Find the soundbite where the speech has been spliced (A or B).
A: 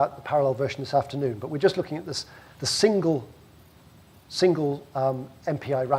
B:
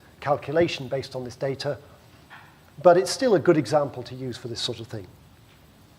B